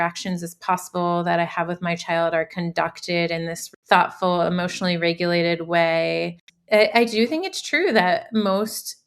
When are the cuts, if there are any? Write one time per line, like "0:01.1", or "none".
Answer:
0:03.6
0:06.4